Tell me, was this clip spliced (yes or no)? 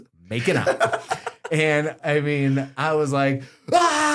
yes